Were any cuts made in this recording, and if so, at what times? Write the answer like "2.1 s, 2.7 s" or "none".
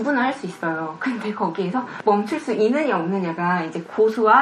none